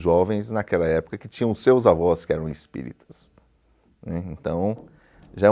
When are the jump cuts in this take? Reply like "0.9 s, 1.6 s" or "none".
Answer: none